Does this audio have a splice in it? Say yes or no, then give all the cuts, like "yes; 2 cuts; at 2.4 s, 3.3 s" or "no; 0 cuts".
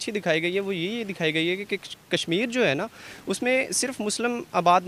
no; 0 cuts